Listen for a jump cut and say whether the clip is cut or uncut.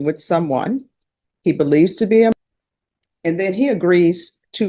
cut